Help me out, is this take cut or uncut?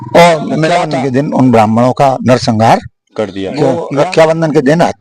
cut